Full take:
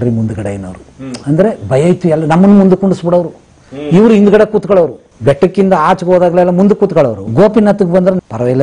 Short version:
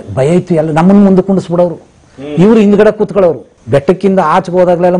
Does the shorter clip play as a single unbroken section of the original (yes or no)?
yes